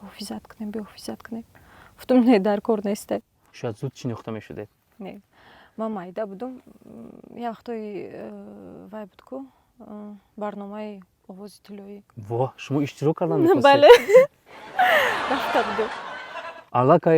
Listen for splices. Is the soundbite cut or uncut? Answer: uncut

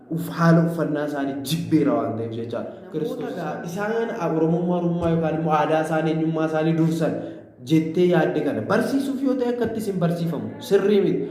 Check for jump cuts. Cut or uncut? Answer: cut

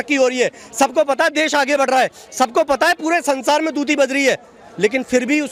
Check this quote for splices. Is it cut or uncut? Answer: uncut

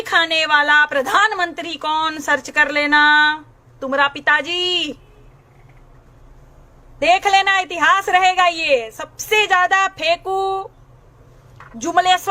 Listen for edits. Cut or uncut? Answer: uncut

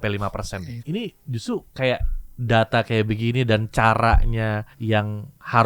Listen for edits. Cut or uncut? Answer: cut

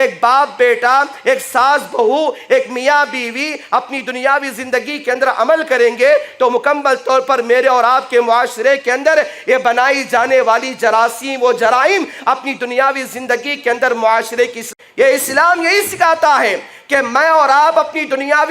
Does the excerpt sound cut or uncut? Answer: cut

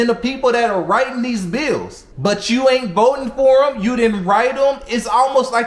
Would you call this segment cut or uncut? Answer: uncut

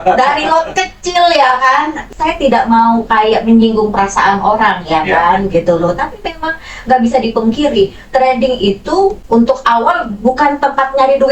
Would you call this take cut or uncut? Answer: cut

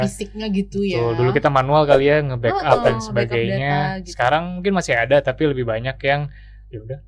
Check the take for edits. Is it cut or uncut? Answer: uncut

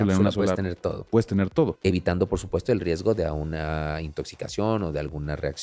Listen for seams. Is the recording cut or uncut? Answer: cut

